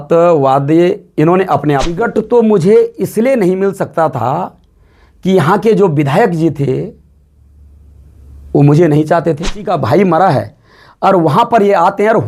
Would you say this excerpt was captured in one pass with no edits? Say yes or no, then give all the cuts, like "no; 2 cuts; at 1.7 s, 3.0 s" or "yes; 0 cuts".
no; 2 cuts; at 2.0 s, 9.6 s